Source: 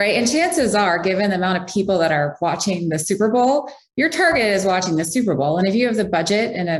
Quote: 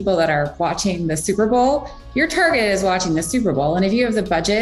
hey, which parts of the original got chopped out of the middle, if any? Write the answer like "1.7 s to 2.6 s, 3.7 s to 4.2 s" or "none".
none